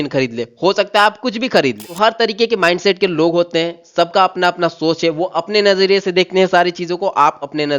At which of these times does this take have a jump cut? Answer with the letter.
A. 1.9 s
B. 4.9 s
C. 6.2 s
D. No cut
A